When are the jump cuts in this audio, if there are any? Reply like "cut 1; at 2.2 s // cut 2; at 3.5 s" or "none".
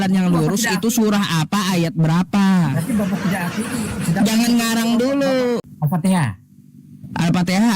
cut 1; at 5.6 s